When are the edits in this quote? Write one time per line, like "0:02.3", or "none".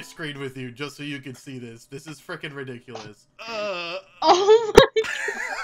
0:03.2